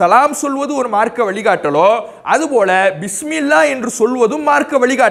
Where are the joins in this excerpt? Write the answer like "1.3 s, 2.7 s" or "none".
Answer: none